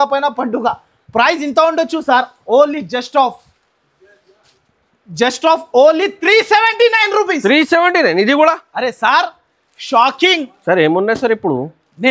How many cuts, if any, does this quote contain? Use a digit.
0